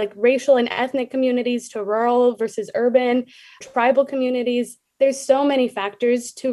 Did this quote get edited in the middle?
no; 0 cuts

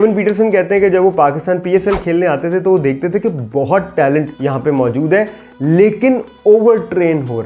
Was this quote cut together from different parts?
yes; 1 cut; at 4.3 s

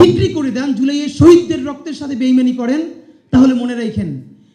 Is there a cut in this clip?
no; 0 cuts

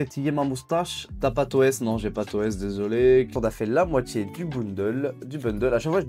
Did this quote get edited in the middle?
yes; 2 cuts; at 1.0 s, 3.3 s

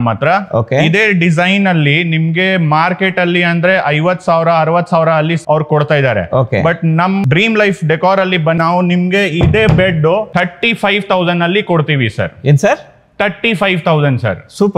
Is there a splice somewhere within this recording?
yes; 4 cuts; at 5.4 s, 7.2 s, 8.6 s, 10.3 s

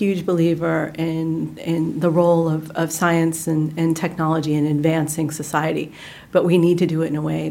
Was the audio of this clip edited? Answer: no; 0 cuts

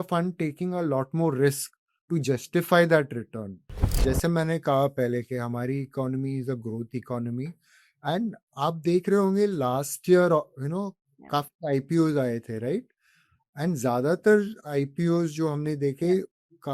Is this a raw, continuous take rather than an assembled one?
no; 1 cut; at 3.8 s

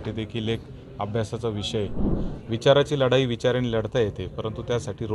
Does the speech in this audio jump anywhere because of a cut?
yes; 1 cut; at 2.2 s

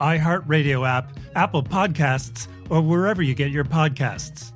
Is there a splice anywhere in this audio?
no; 0 cuts

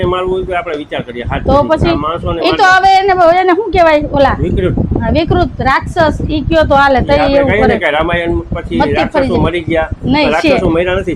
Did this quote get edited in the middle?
no; 0 cuts

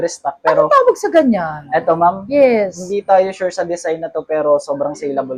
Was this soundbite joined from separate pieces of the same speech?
no; 0 cuts

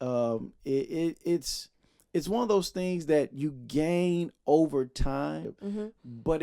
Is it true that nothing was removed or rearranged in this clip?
no; 1 cut; at 5.5 s

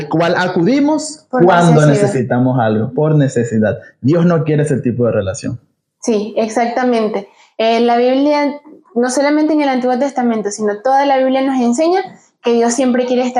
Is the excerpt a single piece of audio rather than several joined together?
yes; 0 cuts

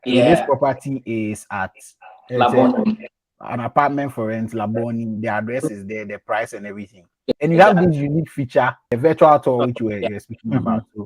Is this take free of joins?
no; 2 cuts; at 7.3 s, 8.9 s

